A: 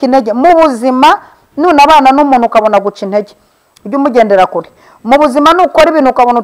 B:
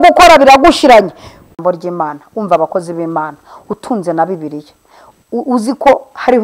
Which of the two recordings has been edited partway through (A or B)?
B